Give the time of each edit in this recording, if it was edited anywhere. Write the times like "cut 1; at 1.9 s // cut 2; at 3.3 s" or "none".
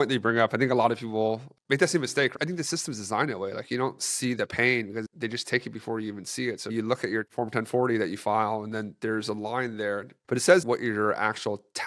cut 1; at 1.5 s // cut 2; at 2.3 s // cut 3; at 5.1 s // cut 4; at 6.7 s // cut 5; at 10.6 s